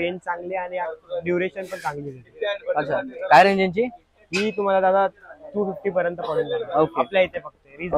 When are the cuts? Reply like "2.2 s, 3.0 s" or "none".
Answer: none